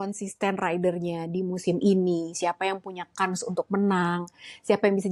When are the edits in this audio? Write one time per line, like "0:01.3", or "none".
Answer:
none

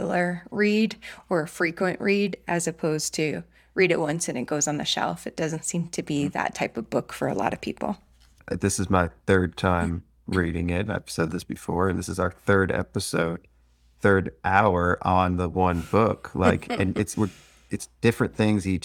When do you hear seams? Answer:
none

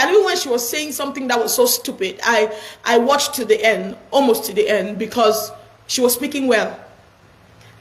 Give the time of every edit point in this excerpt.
none

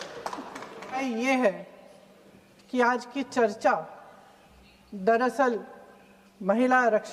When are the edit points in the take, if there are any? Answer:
0:01.0

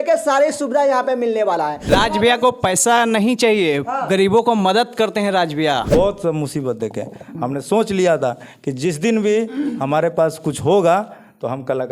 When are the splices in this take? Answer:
0:01.8
0:05.8

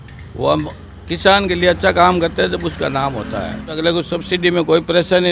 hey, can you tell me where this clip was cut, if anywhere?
0:03.8

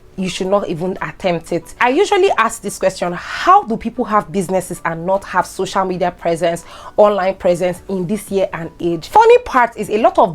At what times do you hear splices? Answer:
0:01.7
0:09.0

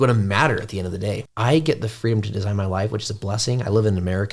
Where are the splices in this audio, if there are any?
0:01.3

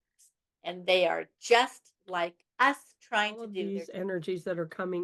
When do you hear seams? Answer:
0:03.5

